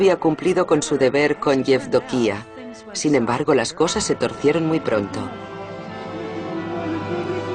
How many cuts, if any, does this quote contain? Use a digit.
1